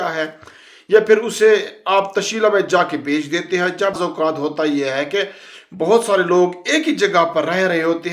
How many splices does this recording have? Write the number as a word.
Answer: one